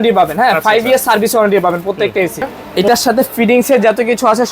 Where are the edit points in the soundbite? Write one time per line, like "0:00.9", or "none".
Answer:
0:02.6

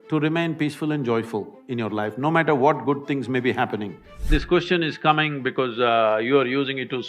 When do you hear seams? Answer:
0:04.3

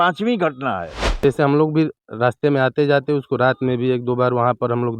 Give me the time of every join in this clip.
0:01.2

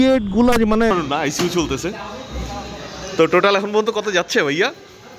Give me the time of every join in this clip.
0:00.9

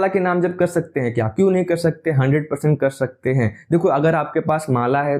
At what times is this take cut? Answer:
none

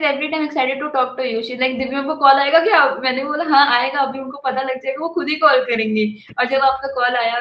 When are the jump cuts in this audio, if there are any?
none

